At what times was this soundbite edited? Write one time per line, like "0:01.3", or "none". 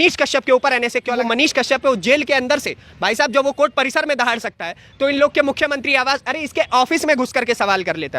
0:01.1